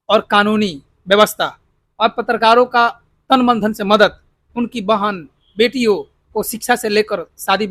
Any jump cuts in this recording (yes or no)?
no